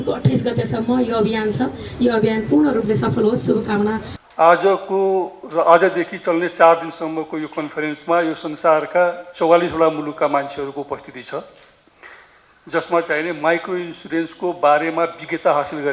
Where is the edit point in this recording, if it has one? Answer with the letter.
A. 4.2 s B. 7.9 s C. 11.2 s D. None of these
A